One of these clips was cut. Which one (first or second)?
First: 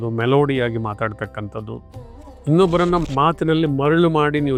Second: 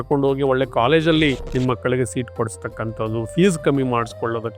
second